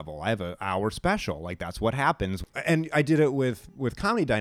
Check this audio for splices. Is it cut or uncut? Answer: cut